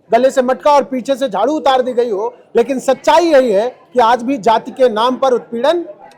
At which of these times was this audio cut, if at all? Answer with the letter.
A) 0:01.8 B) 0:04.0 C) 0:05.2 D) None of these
D